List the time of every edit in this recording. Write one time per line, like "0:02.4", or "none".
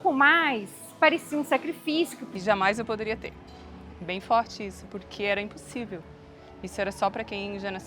0:02.3